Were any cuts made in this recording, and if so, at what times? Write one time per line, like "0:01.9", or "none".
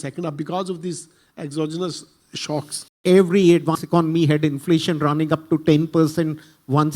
0:03.0